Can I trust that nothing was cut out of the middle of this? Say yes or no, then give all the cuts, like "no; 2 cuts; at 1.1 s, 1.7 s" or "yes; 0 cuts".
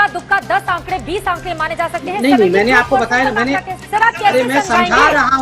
no; 1 cut; at 3.8 s